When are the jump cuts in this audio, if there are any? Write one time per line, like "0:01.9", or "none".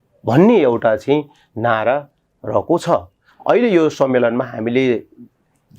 0:03.2